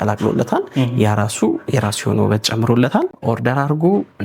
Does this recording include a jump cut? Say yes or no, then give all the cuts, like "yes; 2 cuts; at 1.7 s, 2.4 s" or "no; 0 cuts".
no; 0 cuts